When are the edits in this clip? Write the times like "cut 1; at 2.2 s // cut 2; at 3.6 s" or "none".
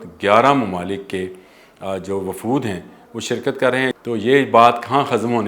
cut 1; at 4.0 s